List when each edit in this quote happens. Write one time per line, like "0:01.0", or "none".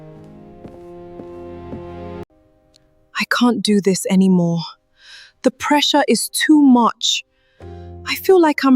0:02.3